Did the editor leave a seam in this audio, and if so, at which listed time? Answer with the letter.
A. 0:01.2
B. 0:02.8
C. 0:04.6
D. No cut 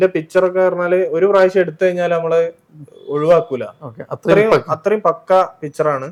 D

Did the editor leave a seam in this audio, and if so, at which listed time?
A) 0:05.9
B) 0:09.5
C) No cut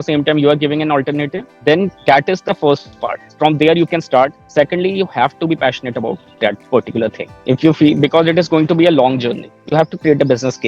B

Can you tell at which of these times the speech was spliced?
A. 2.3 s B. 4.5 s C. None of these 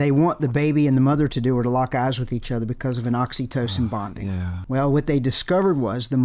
B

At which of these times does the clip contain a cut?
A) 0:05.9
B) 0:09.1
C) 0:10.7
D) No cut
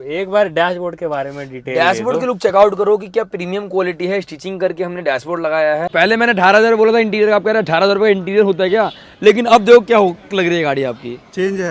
A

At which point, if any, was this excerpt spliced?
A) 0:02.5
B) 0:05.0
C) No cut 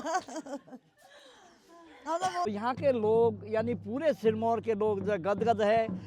A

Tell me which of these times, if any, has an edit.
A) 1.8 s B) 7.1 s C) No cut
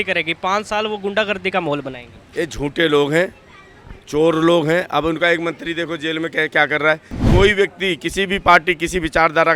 B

